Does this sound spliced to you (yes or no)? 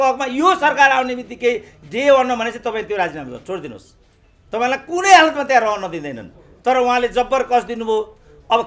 no